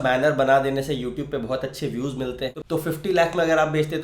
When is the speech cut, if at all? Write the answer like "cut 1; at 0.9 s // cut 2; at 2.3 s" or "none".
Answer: cut 1; at 2.5 s

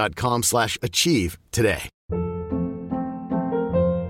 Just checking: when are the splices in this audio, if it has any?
cut 1; at 1.9 s

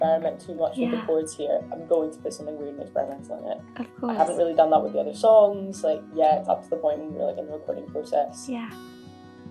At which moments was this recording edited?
none

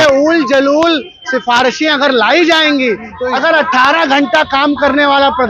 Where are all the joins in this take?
cut 1; at 3.1 s

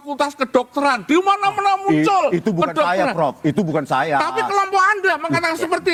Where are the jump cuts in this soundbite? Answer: none

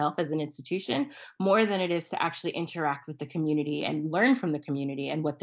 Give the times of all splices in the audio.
none

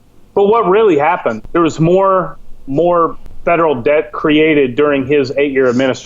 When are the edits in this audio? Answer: cut 1; at 1.4 s // cut 2; at 3.3 s

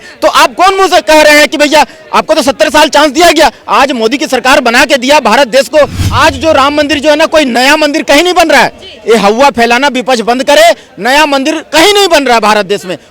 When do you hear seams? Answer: cut 1; at 6.0 s

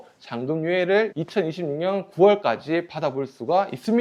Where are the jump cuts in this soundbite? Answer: none

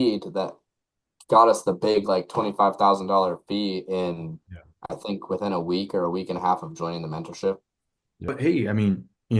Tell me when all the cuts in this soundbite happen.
cut 1; at 8.3 s

